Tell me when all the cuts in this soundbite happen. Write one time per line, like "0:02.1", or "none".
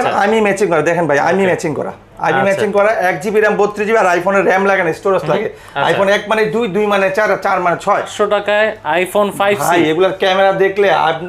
0:08.1